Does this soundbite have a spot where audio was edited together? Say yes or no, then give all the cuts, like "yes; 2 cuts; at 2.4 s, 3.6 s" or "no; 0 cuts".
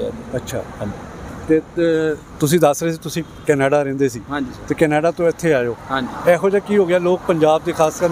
no; 0 cuts